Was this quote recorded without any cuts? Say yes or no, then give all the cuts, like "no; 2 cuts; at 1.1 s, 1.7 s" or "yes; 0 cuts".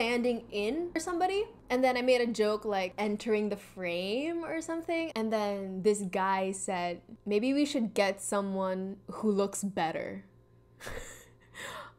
no; 2 cuts; at 1.0 s, 2.9 s